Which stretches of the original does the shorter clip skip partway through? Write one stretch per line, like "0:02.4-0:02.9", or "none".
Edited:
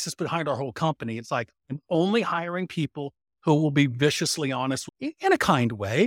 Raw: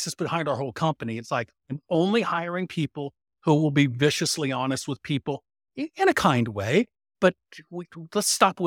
0:04.9-0:05.6